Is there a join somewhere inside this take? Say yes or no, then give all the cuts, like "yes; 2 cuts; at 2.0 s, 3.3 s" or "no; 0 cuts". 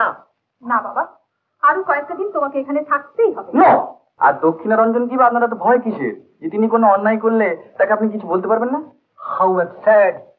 yes; 1 cut; at 4.0 s